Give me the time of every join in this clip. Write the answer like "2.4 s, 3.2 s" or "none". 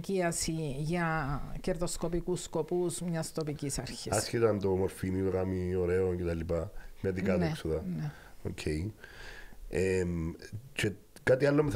none